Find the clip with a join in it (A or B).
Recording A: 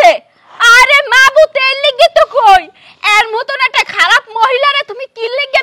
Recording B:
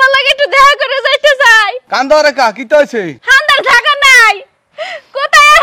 B